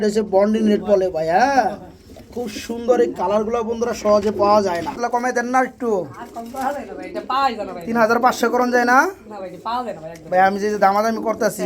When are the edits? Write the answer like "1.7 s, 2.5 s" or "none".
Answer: 5.0 s